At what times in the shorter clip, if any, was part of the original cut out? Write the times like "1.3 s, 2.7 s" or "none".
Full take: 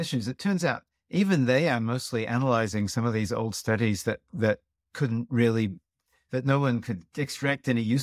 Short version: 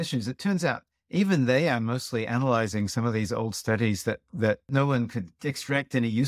4.7 s